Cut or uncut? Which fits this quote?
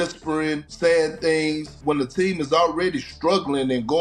cut